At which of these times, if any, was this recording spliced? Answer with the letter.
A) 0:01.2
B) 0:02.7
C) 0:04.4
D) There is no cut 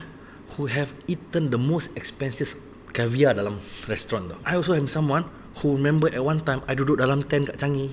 C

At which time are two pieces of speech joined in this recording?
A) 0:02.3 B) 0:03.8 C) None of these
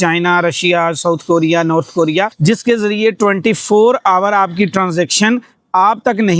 A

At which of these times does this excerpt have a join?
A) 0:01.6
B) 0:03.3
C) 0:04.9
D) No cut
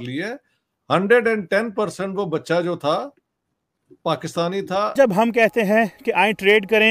C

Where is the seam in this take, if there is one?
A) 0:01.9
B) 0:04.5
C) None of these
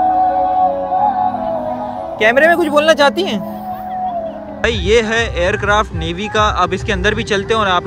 B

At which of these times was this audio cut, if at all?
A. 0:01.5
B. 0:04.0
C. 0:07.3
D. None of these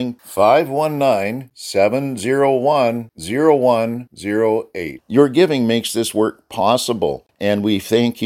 C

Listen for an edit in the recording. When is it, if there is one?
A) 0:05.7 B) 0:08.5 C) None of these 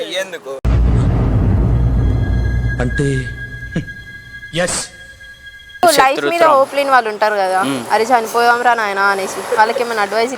A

